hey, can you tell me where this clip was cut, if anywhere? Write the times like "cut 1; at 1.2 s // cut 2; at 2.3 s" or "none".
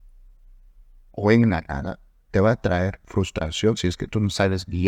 none